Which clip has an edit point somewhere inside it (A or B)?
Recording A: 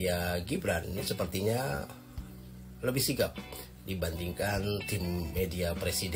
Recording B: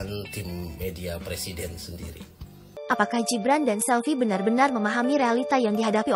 B